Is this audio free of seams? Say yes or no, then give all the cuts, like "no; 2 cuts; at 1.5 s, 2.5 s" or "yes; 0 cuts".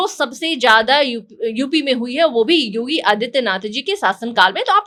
yes; 0 cuts